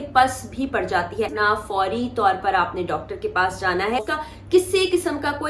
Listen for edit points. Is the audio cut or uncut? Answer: cut